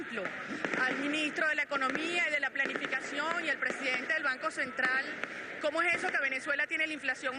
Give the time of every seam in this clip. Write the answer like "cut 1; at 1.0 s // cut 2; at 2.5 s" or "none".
cut 1; at 3.6 s